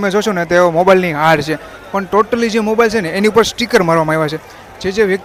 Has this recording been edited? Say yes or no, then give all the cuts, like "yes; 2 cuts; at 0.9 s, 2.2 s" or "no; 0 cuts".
no; 0 cuts